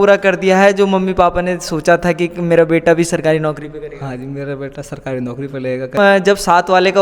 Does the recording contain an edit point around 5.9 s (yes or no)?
yes